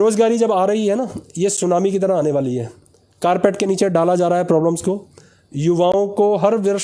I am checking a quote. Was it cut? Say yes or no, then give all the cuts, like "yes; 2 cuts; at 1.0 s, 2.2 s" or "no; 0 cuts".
no; 0 cuts